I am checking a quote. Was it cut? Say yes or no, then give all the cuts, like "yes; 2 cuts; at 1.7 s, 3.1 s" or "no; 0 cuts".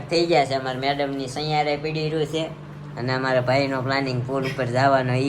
no; 0 cuts